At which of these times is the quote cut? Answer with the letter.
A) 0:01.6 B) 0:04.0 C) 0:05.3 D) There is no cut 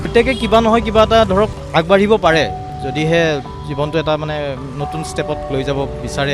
A